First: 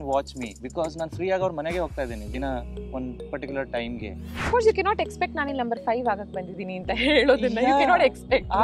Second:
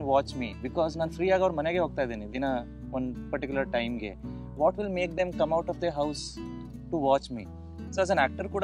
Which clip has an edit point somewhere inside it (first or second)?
first